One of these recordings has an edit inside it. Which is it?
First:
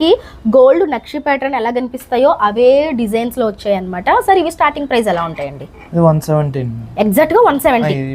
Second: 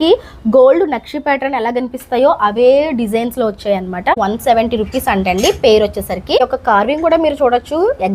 second; 2 cuts; at 4.1 s, 6.4 s

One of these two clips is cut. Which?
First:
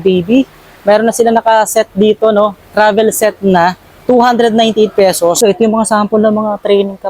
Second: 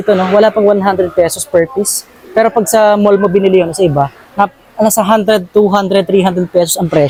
first; 1 cut; at 5.4 s

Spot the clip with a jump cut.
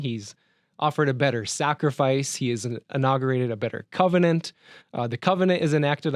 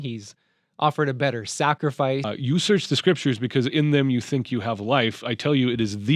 second; 1 cut; at 2.3 s

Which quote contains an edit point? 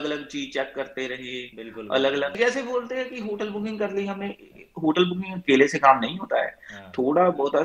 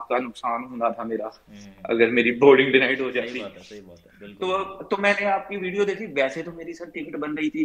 first; 1 cut; at 2.4 s

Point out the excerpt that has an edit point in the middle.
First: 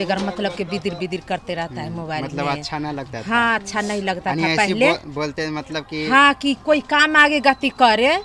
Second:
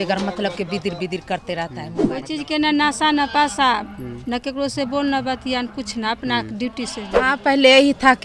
second; 2 cuts; at 2.0 s, 7.4 s

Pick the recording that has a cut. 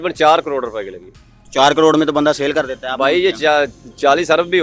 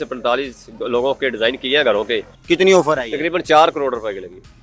second; 1 cut; at 2.3 s

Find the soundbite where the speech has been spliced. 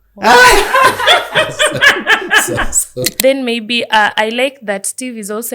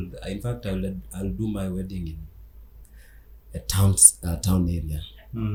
first; 1 cut; at 3.2 s

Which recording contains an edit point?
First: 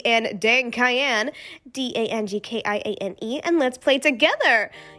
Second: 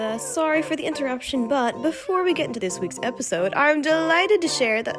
second; 1 cut; at 2.6 s

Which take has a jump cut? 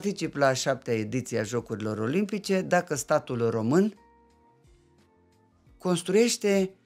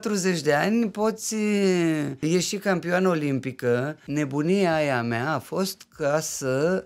second; 2 cuts; at 2.2 s, 4.0 s

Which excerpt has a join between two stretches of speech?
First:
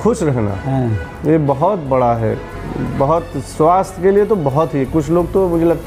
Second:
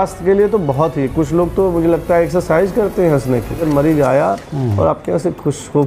second; 1 cut; at 3.6 s

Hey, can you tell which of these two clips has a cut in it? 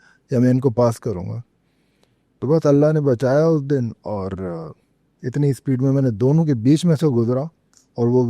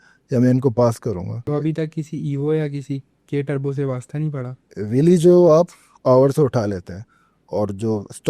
second; 2 cuts; at 1.5 s, 4.8 s

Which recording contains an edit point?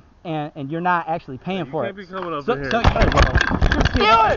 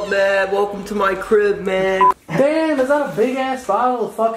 second; 1 cut; at 2.2 s

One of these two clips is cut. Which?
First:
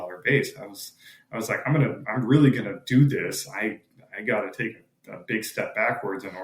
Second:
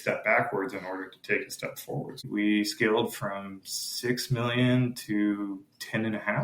second; 1 cut; at 2.3 s

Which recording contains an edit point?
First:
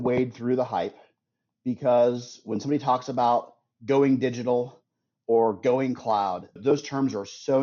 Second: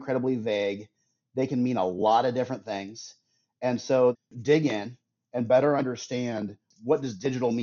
second; 1 cut; at 4.2 s

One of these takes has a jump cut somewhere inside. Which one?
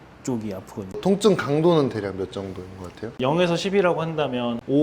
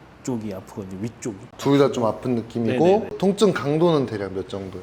first; 1 cut; at 0.9 s

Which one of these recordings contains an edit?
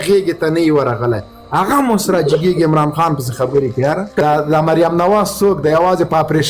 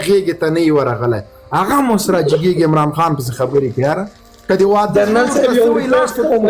first; 1 cut; at 4.1 s

